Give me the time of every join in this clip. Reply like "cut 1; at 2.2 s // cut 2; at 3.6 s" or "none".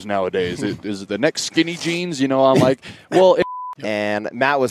cut 1; at 3.4 s